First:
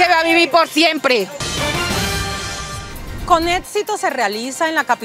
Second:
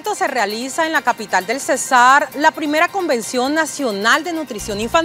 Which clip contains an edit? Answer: first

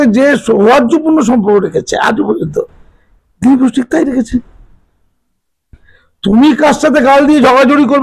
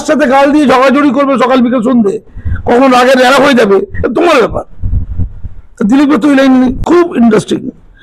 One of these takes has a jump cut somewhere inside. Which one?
second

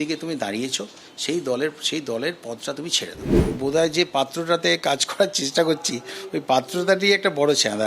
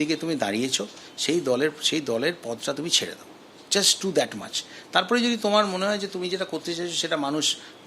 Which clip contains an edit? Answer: first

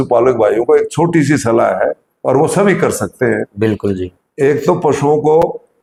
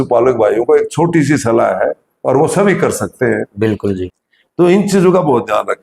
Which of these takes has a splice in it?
second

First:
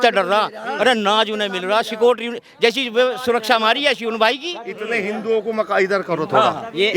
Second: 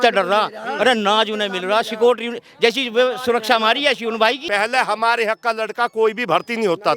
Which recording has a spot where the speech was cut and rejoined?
second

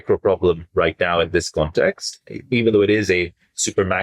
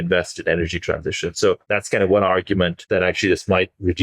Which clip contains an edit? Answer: second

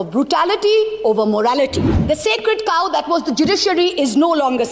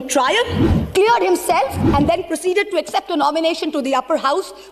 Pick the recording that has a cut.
first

